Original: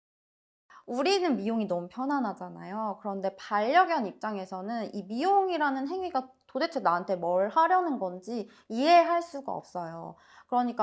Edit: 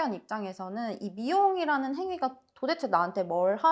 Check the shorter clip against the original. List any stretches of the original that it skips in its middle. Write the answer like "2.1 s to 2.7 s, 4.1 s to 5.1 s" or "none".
none